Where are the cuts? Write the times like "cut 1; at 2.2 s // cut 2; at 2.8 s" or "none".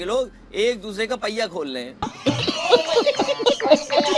none